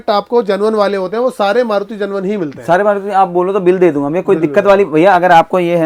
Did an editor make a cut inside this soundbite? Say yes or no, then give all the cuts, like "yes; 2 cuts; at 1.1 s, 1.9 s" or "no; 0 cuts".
no; 0 cuts